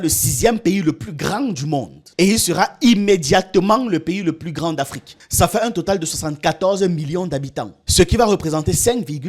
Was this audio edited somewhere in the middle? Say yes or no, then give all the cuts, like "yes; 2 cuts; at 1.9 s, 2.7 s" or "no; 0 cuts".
yes; 2 cuts; at 2.0 s, 5.0 s